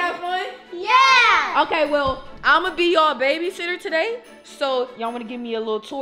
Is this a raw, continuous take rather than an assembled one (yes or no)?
yes